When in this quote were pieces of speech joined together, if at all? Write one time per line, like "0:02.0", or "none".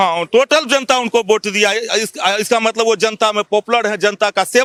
none